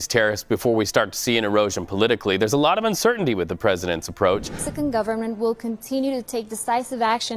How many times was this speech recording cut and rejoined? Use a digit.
1